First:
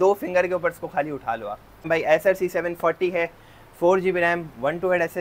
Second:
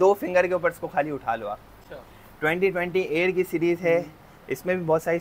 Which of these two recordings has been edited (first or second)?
first